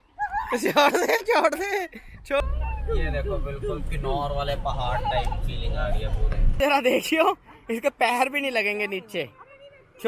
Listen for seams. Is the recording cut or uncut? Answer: cut